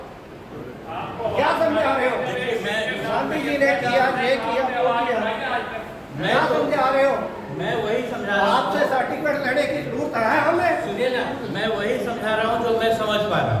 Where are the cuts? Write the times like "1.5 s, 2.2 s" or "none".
none